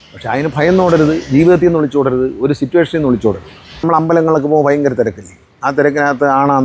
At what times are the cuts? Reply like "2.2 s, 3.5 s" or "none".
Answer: 3.8 s